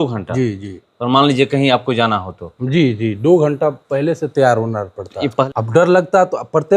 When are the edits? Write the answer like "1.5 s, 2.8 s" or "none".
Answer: 5.5 s